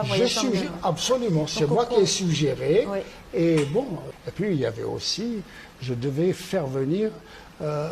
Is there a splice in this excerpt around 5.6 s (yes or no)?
no